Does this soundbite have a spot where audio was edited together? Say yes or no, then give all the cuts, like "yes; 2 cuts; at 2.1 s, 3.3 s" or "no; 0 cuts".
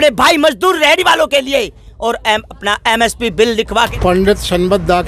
yes; 1 cut; at 3.9 s